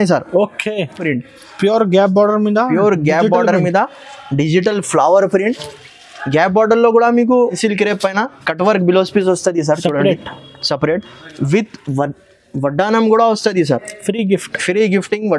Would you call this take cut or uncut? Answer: cut